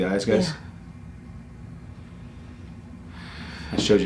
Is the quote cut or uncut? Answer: uncut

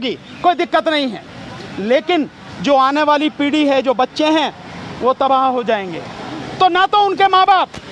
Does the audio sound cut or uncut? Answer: uncut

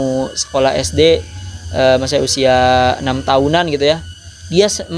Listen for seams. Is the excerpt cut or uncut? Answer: uncut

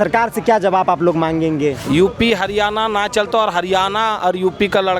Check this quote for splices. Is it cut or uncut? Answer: cut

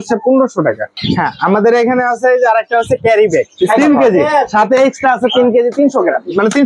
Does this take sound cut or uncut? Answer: cut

